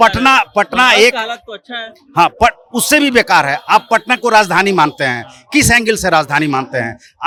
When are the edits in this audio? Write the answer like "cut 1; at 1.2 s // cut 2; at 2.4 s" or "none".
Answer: none